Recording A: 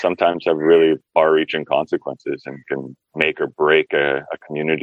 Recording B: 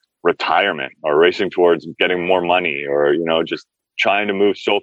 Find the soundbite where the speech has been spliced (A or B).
A